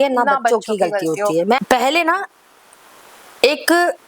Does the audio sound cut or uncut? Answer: cut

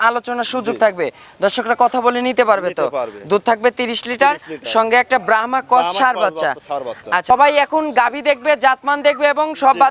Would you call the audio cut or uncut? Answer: cut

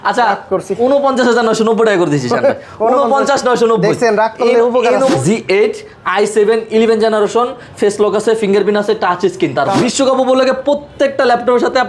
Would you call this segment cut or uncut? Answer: cut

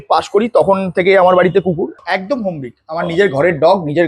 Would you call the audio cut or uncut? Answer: cut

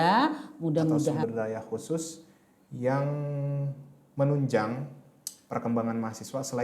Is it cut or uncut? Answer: cut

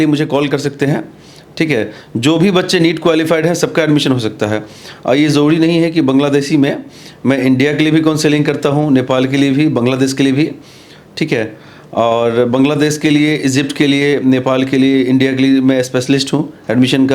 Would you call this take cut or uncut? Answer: uncut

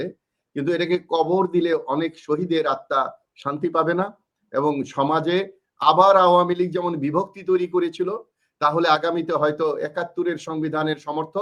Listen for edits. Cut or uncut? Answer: uncut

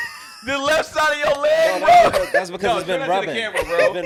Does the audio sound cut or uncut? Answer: uncut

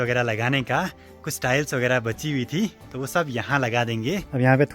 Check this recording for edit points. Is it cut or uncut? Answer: uncut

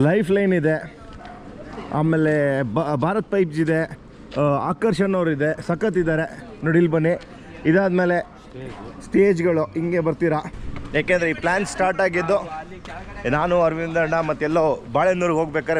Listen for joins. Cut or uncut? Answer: uncut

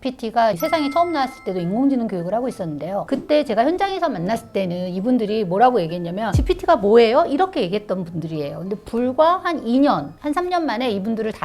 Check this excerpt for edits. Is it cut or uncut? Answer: uncut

